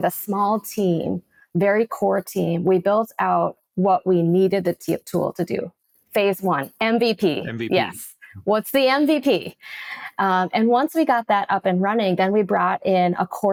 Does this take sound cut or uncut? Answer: uncut